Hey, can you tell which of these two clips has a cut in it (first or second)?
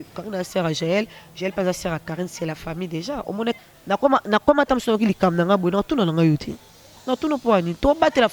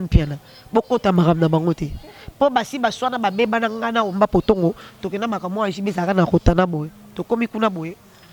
first